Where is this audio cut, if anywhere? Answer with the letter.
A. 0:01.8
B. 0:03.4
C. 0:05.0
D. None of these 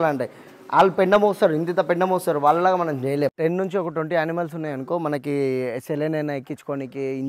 B